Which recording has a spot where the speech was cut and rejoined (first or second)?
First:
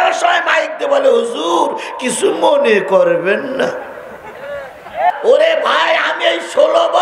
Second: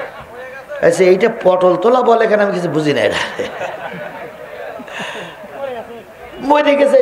first